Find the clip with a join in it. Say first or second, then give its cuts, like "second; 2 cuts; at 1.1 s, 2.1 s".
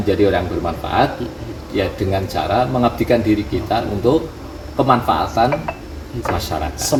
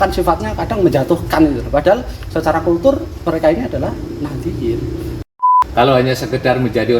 second; 1 cut; at 5.2 s